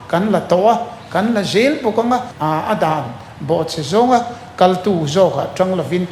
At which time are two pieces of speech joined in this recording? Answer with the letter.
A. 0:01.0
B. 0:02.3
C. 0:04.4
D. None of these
B